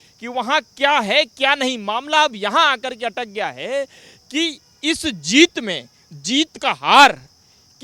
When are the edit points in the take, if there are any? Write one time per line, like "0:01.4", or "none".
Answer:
none